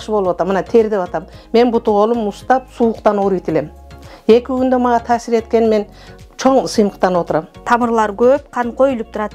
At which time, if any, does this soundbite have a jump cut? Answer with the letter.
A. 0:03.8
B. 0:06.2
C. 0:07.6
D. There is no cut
C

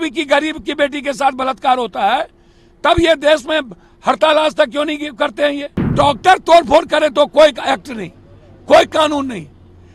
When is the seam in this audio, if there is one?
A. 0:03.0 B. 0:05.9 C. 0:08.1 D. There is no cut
B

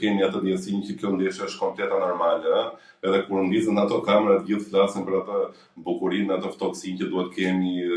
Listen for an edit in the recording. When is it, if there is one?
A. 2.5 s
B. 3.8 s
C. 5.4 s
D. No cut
D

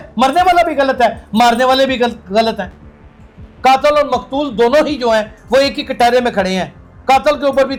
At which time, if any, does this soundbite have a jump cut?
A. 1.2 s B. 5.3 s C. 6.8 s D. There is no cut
D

